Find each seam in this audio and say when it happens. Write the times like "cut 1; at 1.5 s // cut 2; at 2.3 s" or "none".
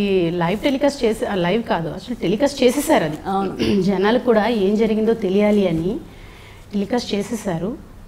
none